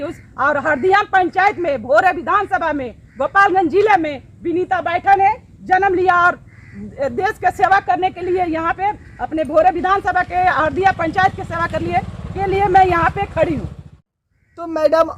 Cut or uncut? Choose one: cut